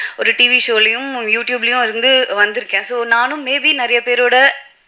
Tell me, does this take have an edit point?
no; 0 cuts

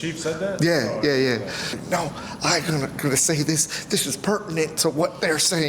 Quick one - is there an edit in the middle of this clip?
yes; 1 cut; at 1.8 s

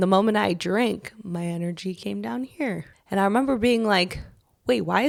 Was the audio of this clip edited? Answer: no; 0 cuts

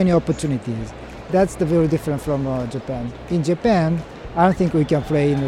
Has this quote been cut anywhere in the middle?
yes; 1 cut; at 3.1 s

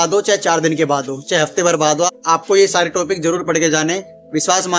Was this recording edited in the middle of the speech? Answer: no; 0 cuts

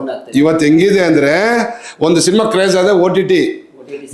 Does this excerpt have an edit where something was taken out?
no; 0 cuts

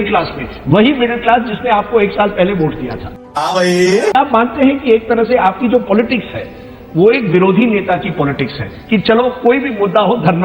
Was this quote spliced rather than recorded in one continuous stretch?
yes; 1 cut; at 4.1 s

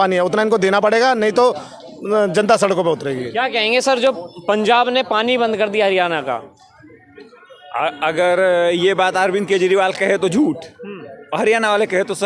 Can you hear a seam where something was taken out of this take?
no; 0 cuts

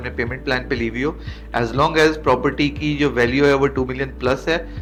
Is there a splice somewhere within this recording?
no; 0 cuts

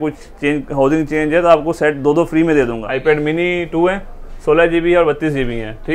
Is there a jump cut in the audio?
yes; 1 cut; at 2.8 s

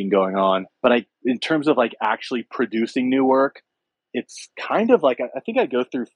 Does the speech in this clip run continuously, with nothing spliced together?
no; 1 cut; at 1.1 s

